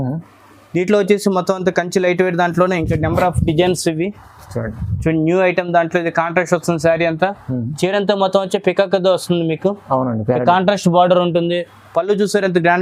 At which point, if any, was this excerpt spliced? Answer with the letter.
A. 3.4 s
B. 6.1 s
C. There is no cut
C